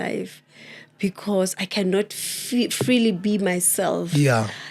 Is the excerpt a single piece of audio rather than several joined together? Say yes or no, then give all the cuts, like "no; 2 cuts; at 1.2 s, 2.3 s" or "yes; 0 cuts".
yes; 0 cuts